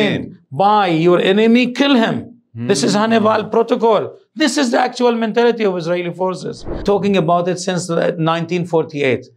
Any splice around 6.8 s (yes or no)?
yes